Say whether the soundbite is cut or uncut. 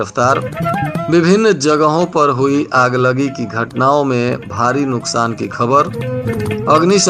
uncut